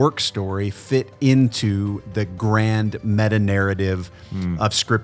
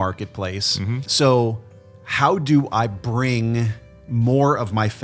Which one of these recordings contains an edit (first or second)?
second